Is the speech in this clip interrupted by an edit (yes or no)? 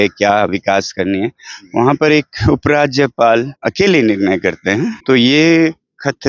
yes